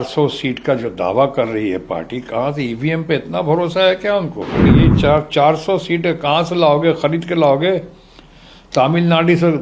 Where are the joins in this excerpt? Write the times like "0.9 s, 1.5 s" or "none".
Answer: 4.7 s